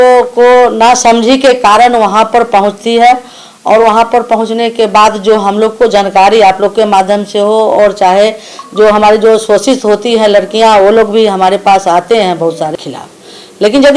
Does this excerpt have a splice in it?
yes; 1 cut; at 12.7 s

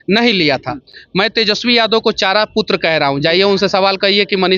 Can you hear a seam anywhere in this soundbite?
no; 0 cuts

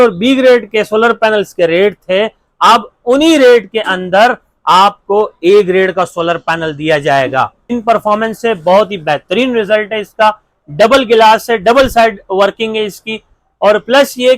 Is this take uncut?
no; 1 cut; at 7.8 s

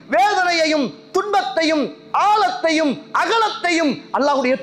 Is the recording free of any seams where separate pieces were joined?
yes; 0 cuts

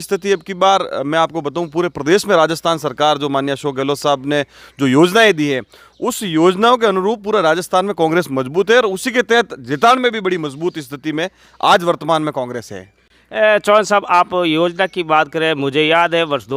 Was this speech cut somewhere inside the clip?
no; 0 cuts

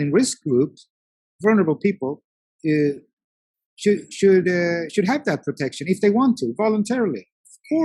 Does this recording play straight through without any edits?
yes; 0 cuts

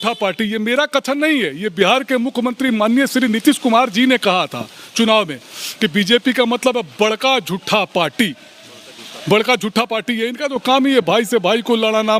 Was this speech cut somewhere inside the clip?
no; 0 cuts

